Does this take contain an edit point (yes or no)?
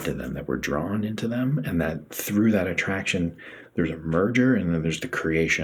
no